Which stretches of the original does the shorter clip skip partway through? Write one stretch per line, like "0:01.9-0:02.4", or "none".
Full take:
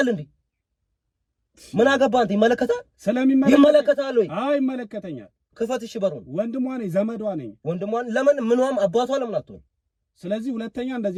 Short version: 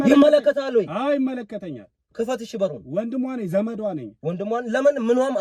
none